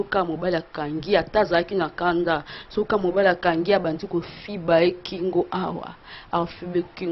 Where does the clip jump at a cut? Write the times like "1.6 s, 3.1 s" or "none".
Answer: none